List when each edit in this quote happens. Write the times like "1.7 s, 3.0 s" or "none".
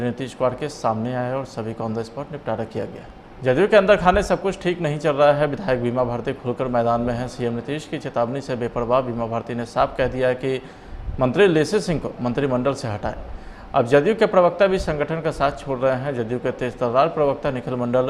3.4 s